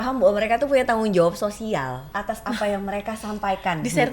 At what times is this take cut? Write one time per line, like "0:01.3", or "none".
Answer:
0:02.1